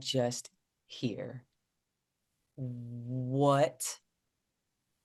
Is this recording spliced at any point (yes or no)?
no